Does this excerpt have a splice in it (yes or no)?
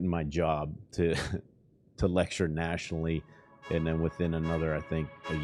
no